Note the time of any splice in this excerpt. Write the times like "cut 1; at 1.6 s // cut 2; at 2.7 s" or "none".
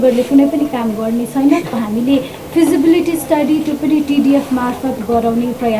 cut 1; at 1.8 s